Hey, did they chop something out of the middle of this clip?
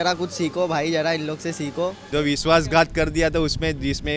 yes; 1 cut; at 2.0 s

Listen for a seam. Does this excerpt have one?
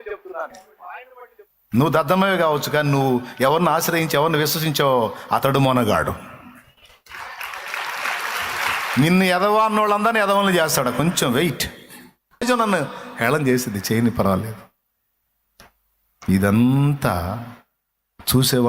yes; 1 cut; at 12.4 s

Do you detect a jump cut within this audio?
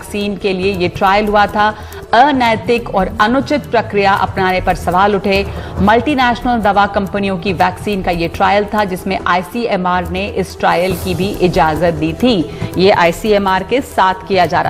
no; 0 cuts

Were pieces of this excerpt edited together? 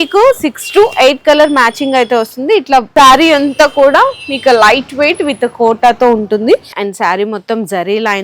yes; 2 cuts; at 2.9 s, 6.8 s

